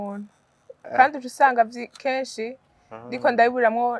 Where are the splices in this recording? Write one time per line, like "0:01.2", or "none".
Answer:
none